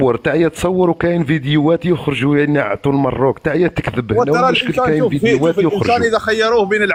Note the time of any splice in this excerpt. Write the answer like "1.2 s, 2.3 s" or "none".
none